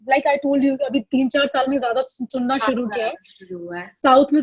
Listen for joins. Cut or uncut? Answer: uncut